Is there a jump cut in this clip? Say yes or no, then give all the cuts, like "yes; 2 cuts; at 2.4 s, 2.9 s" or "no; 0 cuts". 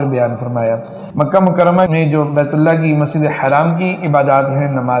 yes; 2 cuts; at 1.0 s, 1.9 s